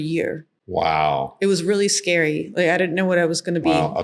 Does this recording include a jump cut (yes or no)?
no